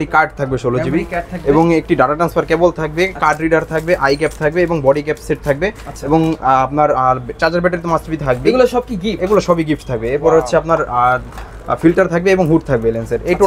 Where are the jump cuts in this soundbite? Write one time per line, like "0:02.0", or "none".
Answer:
none